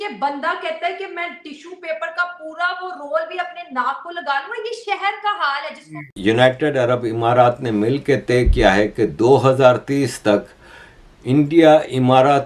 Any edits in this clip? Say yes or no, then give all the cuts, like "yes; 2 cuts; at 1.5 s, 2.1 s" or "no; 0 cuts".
yes; 1 cut; at 6.1 s